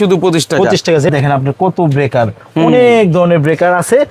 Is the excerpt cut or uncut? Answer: cut